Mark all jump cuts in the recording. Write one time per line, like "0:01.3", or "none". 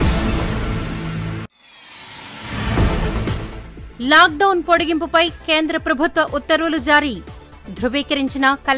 0:01.1
0:03.2